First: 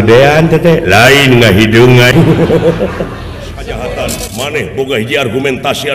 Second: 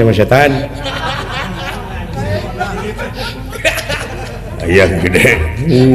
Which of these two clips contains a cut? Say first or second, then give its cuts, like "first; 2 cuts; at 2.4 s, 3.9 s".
first; 2 cuts; at 2.1 s, 4.2 s